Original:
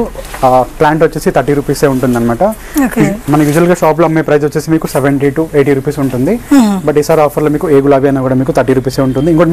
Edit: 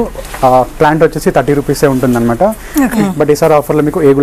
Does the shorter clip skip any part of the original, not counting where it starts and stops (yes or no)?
yes